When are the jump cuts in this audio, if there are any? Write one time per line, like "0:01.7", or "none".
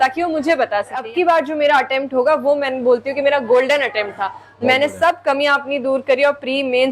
0:01.0